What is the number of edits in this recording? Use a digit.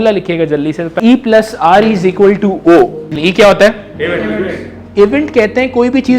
2